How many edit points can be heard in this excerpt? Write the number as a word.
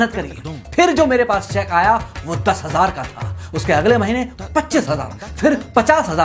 zero